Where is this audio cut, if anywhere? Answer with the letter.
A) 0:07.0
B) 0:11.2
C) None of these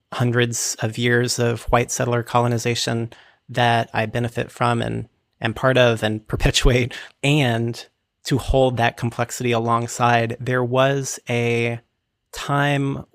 A